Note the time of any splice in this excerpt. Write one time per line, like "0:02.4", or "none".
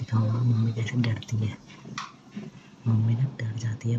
none